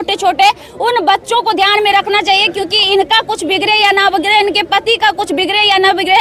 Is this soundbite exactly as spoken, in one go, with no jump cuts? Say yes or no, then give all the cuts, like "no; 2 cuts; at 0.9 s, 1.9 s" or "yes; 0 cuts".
yes; 0 cuts